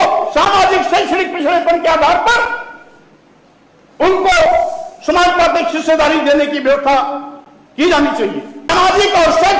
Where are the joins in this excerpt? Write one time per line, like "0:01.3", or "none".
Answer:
0:08.7